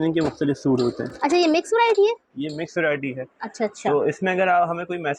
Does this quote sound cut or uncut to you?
uncut